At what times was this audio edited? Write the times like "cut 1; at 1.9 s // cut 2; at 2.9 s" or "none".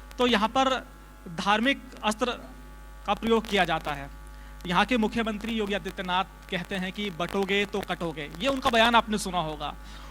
none